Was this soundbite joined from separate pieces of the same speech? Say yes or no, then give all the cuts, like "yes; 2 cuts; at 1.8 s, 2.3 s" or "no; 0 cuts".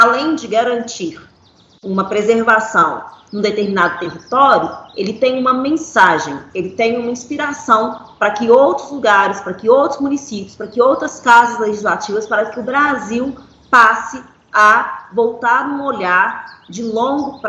no; 0 cuts